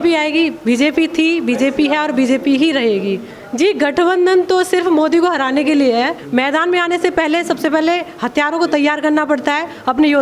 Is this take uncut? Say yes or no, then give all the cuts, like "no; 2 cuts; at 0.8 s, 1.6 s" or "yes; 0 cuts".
no; 2 cuts; at 3.3 s, 6.2 s